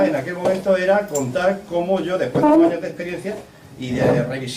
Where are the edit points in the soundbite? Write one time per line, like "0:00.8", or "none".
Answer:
0:03.6